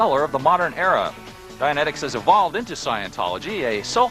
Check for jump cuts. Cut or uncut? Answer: uncut